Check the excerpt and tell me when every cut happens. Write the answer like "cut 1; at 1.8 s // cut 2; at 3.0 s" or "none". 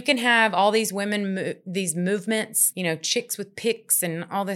cut 1; at 2.6 s